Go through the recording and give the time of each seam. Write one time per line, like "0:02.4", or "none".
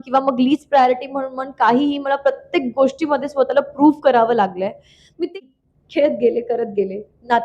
0:05.3